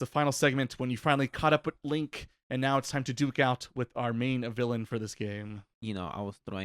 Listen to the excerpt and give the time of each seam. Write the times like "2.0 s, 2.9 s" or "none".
5.7 s